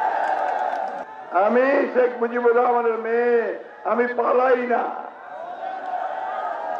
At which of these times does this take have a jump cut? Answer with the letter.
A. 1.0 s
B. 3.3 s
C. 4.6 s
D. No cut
A